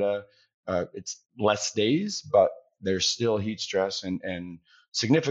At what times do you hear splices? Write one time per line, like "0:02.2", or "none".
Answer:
none